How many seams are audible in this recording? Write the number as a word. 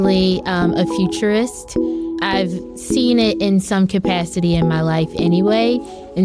one